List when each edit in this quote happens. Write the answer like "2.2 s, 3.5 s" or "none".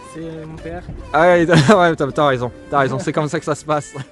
none